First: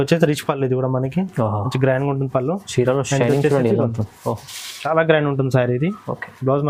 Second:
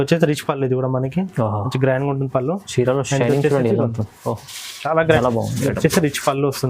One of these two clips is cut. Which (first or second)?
second